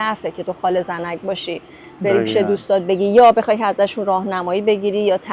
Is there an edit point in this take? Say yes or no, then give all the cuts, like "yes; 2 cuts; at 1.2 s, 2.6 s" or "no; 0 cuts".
no; 0 cuts